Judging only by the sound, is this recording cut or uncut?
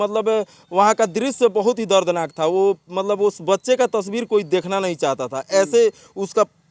uncut